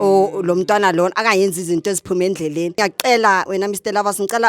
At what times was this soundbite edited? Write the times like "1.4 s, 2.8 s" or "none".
2.8 s

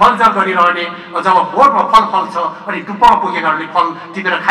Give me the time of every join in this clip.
none

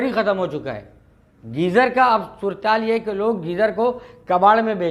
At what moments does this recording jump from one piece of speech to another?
none

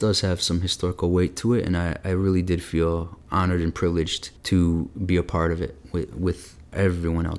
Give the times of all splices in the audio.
none

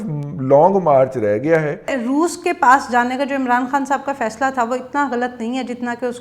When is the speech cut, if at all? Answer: 2.0 s

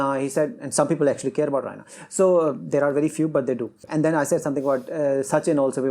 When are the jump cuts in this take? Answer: 3.8 s

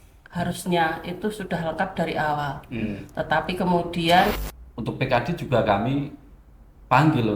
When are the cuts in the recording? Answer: 4.3 s

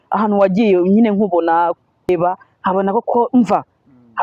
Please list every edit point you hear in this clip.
2.1 s

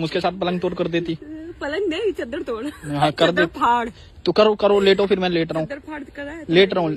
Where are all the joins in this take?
none

